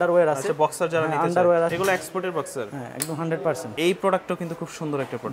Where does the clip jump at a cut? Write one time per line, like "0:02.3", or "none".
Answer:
0:01.7
0:03.7